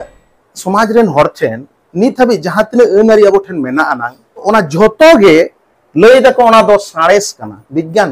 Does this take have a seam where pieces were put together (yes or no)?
yes